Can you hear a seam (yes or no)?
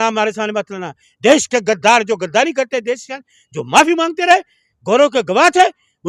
no